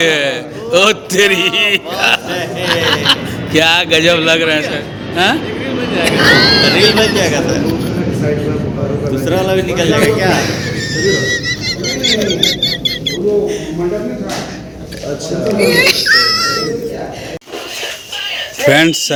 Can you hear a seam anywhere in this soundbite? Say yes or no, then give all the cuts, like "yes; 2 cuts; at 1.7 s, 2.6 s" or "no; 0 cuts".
no; 0 cuts